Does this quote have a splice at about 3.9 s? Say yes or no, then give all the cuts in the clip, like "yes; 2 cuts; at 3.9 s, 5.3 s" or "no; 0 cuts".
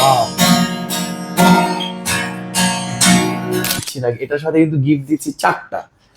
yes; 1 cut; at 3.9 s